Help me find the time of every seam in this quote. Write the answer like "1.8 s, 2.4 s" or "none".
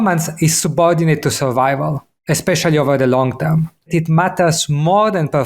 2.1 s, 3.9 s